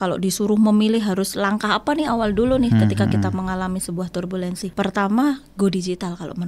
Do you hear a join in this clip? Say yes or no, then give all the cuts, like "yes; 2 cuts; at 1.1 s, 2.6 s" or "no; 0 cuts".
yes; 1 cut; at 4.7 s